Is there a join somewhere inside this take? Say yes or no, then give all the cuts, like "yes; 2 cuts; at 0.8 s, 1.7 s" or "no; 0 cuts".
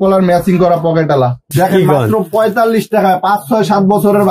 yes; 1 cut; at 1.4 s